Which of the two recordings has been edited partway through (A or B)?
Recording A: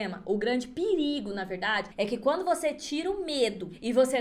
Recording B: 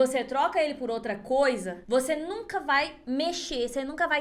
A